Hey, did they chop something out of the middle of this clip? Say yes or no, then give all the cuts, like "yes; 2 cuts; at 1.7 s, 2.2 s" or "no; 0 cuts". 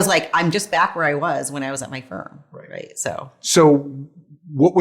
yes; 1 cut; at 3.4 s